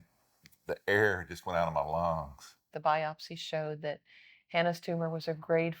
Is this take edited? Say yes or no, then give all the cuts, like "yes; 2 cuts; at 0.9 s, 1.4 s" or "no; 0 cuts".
yes; 1 cut; at 2.6 s